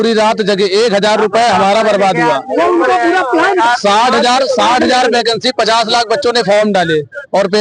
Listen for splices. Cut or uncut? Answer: uncut